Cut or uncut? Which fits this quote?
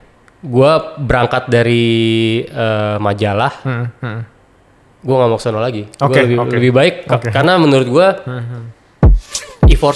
uncut